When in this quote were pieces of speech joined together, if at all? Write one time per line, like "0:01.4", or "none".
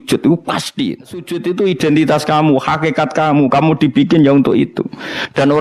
0:01.3